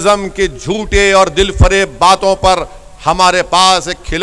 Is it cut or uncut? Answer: uncut